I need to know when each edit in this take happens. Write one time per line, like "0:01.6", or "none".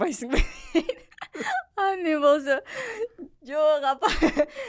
none